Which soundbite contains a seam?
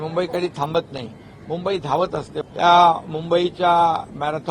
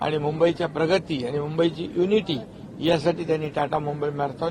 first; 1 cut; at 2.4 s

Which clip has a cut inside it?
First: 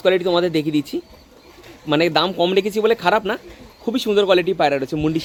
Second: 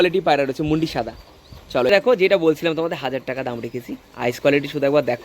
second; 1 cut; at 1.9 s

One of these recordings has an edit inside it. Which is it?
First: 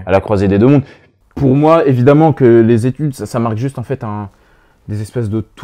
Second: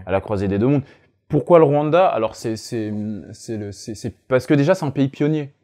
first; 1 cut; at 1.1 s

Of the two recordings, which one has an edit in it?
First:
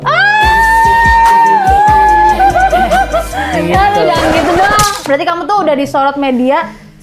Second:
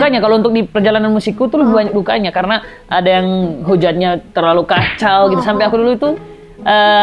first; 1 cut; at 5.0 s

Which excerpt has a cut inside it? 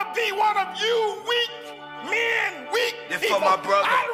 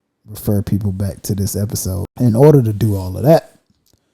second; 1 cut; at 2.0 s

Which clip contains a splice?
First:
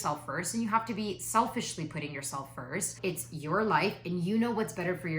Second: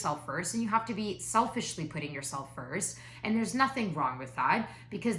first; 1 cut; at 3.0 s

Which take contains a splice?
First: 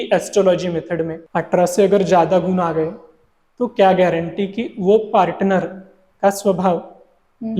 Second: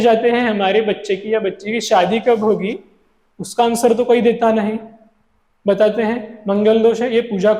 first; 1 cut; at 1.2 s

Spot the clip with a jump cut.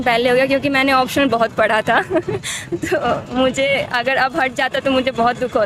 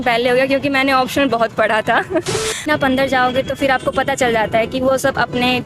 second; 1 cut; at 2.7 s

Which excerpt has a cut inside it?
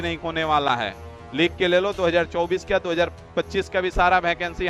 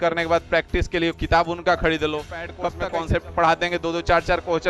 second; 1 cut; at 2.6 s

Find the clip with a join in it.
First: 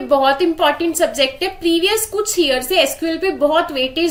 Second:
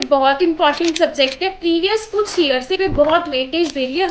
second; 1 cut; at 2.8 s

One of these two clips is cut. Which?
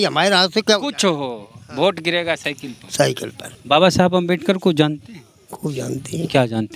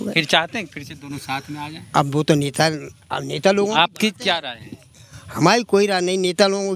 first; 1 cut; at 3.5 s

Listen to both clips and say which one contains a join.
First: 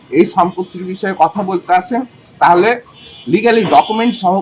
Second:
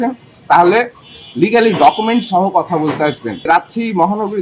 second; 1 cut; at 3.5 s

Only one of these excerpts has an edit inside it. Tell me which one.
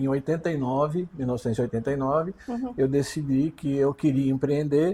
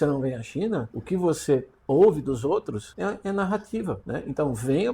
second; 3 cuts; at 0.9 s, 2.8 s, 4.0 s

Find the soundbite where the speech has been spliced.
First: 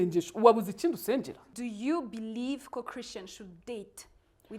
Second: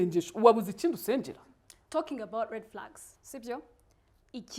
first; 1 cut; at 1.5 s

